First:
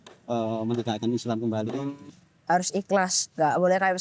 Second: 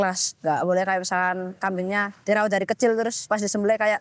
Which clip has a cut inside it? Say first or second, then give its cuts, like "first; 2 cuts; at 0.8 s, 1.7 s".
first; 1 cut; at 2.0 s